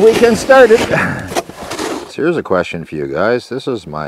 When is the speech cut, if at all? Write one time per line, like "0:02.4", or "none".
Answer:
0:01.6